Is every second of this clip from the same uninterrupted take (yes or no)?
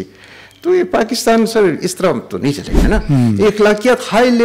no